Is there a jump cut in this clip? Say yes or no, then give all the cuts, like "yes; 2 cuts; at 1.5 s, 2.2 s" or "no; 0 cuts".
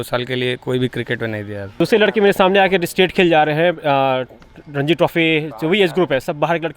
yes; 1 cut; at 1.7 s